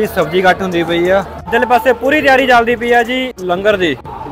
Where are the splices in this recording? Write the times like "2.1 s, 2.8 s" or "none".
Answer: 1.5 s, 3.3 s